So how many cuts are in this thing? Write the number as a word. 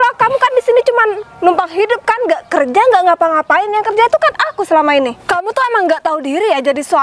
one